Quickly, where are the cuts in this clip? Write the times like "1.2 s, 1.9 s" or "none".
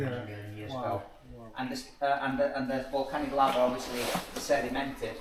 none